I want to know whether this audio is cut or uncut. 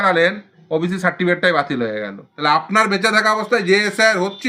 cut